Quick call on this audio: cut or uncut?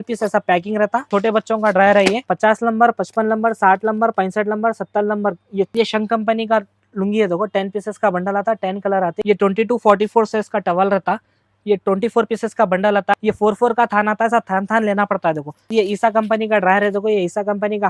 cut